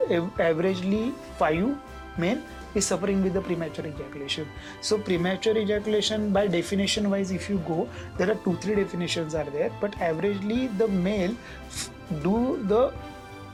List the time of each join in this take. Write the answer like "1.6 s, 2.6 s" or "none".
none